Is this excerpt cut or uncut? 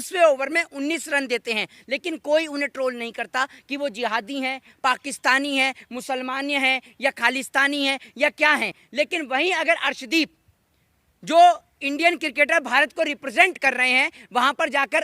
uncut